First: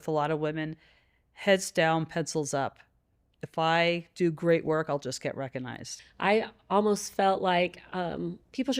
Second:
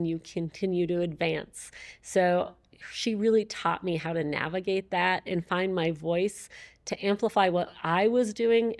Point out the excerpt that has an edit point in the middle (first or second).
first